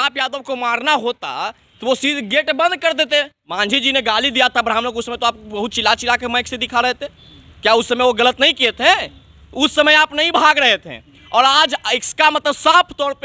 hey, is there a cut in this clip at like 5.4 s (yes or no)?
no